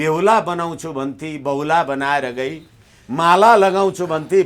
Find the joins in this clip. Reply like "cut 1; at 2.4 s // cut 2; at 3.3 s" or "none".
none